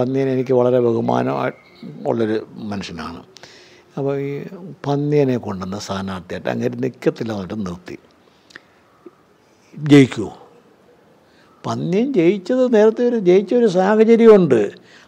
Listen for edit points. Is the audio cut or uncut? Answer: uncut